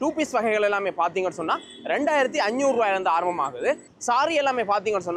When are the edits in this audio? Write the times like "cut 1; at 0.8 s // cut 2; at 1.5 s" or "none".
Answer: none